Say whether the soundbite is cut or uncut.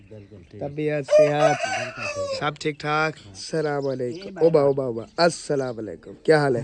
cut